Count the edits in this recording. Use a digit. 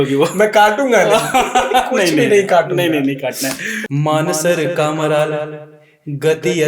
1